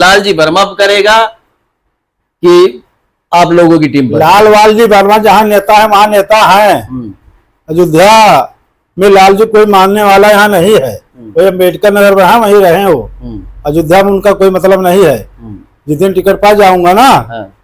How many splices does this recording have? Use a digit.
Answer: 0